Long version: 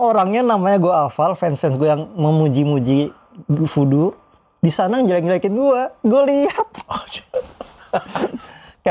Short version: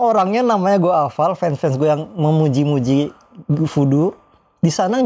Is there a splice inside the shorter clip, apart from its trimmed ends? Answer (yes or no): no